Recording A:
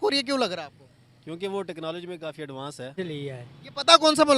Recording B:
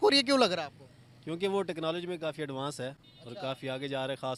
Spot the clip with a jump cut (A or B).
A